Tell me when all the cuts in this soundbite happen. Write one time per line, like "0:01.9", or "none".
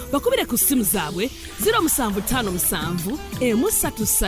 none